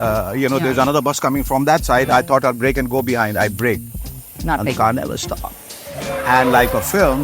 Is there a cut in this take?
no; 0 cuts

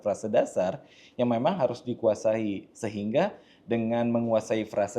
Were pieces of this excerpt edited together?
no; 0 cuts

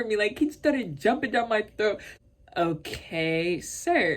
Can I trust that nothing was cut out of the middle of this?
no; 1 cut; at 2.1 s

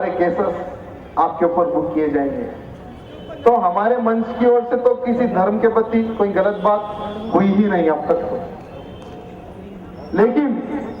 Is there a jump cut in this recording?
yes; 1 cut; at 9.8 s

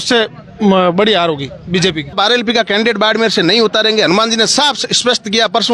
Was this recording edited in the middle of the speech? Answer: yes; 1 cut; at 2.1 s

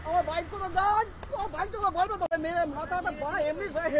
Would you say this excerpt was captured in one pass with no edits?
no; 1 cut; at 2.2 s

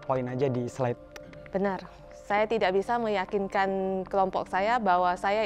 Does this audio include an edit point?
yes; 1 cut; at 1.0 s

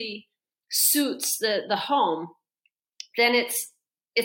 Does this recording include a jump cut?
no; 0 cuts

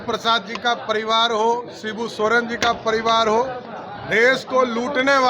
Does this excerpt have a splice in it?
no; 0 cuts

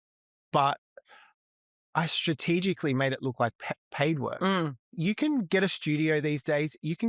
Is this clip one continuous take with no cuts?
no; 1 cut; at 5.0 s

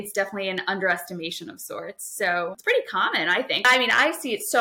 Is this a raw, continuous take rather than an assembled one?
no; 2 cuts; at 2.6 s, 3.6 s

